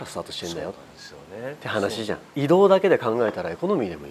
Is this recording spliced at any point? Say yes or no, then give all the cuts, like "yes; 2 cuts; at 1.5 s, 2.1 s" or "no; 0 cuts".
yes; 1 cut; at 2.2 s